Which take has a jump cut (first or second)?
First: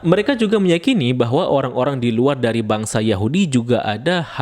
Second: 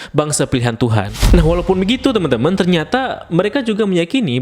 second